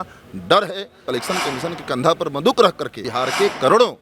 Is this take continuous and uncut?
no; 2 cuts; at 0.9 s, 3.1 s

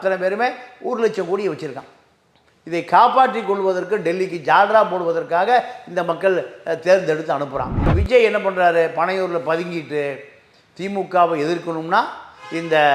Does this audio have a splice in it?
yes; 1 cut; at 7.8 s

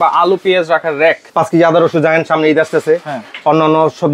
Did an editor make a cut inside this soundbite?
yes; 1 cut; at 1.2 s

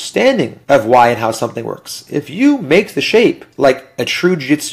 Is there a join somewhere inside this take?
no; 0 cuts

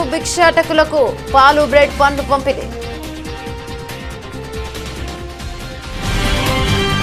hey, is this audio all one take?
yes; 0 cuts

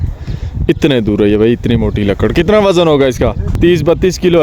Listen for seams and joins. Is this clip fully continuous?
no; 1 cut; at 3.4 s

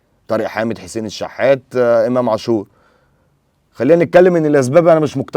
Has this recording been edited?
no; 0 cuts

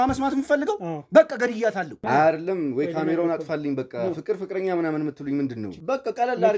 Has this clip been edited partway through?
yes; 2 cuts; at 2.0 s, 5.7 s

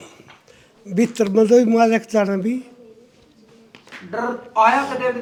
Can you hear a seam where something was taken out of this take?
no; 0 cuts

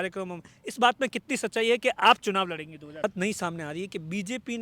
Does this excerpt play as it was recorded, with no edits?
no; 1 cut; at 3.0 s

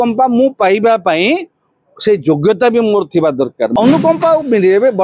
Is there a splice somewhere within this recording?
yes; 1 cut; at 3.7 s

